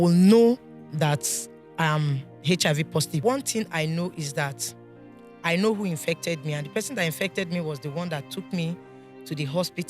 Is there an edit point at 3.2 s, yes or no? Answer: yes